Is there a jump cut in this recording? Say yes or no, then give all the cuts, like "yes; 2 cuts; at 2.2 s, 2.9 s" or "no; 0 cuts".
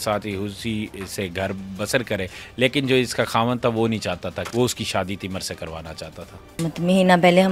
yes; 2 cuts; at 4.5 s, 6.6 s